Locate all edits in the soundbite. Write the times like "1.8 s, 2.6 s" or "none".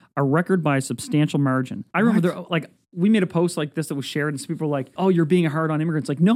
1.8 s, 4.9 s